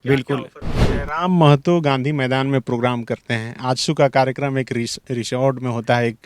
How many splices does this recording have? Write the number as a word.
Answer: one